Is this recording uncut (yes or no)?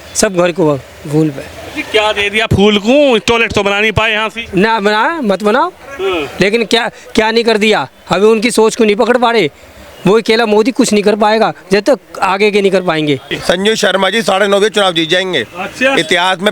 no